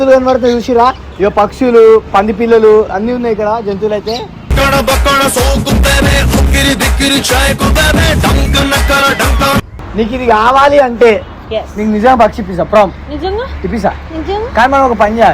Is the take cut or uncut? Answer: cut